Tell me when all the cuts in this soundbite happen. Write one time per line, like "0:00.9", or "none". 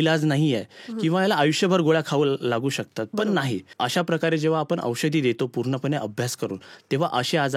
0:03.7

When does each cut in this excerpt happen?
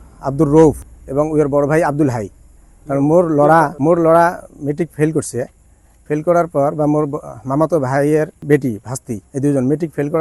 0:00.9
0:03.7
0:08.4
0:09.2

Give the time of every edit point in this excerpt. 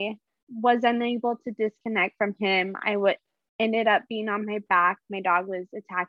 none

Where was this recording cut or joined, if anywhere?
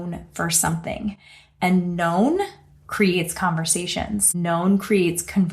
0:04.3

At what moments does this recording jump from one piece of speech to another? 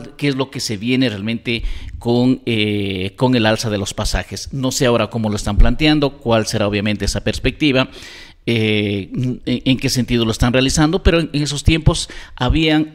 none

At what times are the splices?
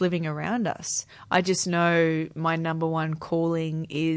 0:01.1

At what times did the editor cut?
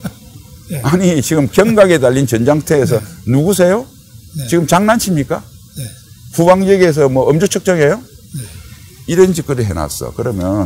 none

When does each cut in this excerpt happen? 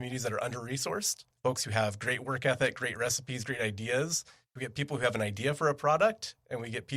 0:01.2
0:04.6

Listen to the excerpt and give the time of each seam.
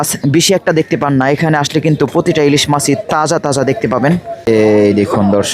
0:04.5

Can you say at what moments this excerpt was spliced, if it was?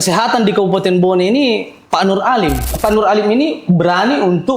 0:02.7

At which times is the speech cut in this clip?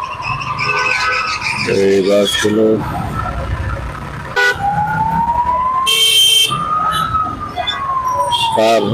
0:04.4

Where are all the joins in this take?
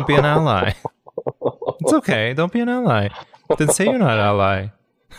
none

